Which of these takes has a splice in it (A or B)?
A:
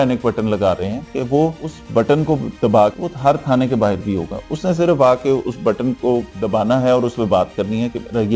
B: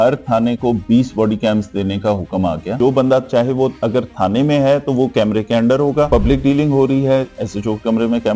B